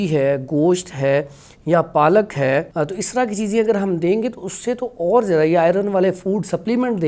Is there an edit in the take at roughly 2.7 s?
yes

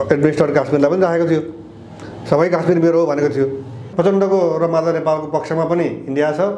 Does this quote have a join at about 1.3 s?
no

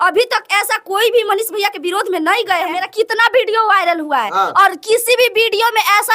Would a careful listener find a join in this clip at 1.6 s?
no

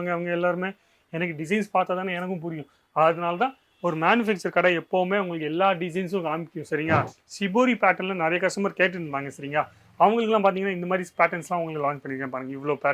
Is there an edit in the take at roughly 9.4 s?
no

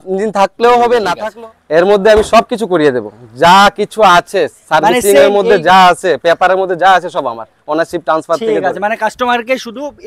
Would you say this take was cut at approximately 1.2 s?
yes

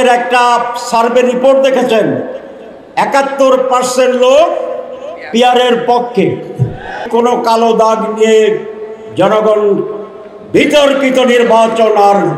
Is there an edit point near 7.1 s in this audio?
yes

